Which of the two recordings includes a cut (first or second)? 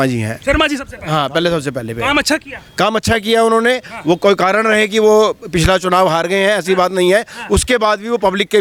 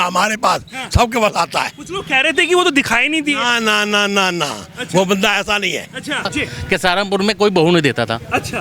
second